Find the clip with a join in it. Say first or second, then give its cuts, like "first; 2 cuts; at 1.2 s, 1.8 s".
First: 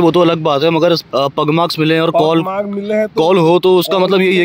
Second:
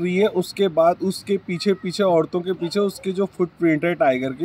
first; 1 cut; at 1.1 s